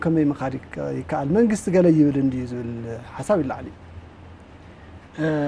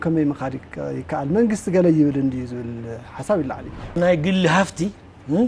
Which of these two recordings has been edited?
second; 1 cut; at 4.0 s

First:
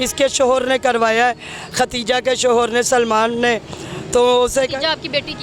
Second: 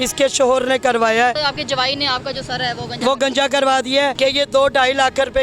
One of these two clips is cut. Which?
second; 2 cuts; at 1.4 s, 4.1 s

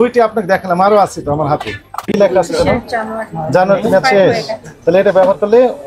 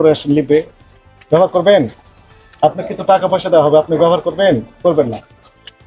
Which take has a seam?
first; 1 cut; at 2.1 s

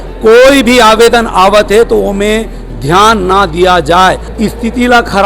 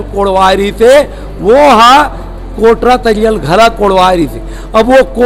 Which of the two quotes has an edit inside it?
first; 1 cut; at 4.3 s

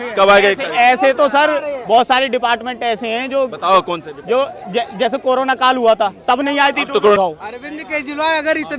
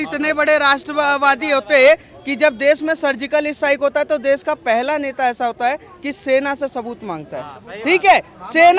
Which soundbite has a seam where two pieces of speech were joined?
first; 1 cut; at 7.2 s

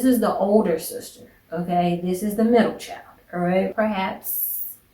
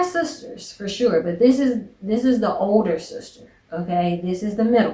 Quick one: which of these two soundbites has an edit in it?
first; 1 cut; at 3.7 s

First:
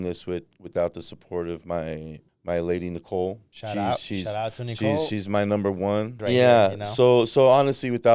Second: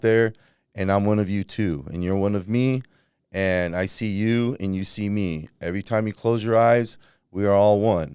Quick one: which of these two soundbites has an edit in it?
first; 2 cuts; at 3.5 s, 6.1 s

